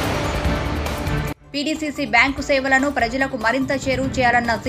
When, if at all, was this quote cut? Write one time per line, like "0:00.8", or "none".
0:01.2